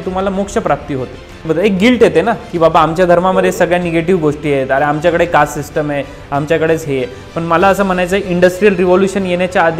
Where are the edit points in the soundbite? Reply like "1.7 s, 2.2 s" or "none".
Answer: 1.4 s

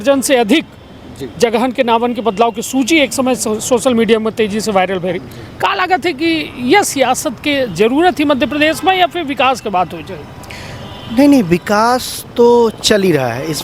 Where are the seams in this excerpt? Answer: none

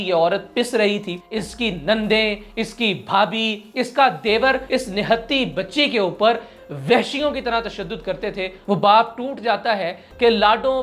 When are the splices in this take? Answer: 1.1 s, 4.6 s, 8.6 s

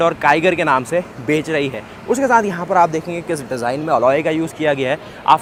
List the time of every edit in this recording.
none

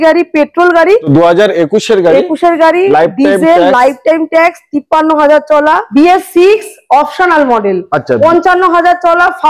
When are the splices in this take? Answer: 1.1 s, 5.9 s

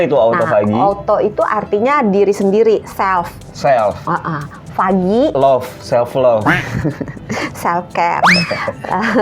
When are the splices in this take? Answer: none

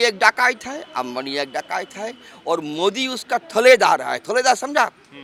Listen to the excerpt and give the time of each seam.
none

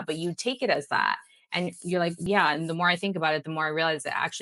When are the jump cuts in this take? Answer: 2.2 s

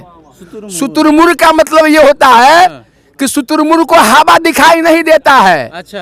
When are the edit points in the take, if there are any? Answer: none

